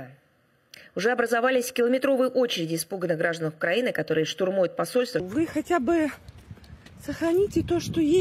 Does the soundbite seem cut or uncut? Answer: cut